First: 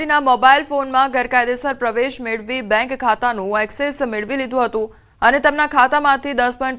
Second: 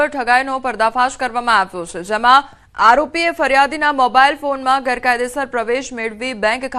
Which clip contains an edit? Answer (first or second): first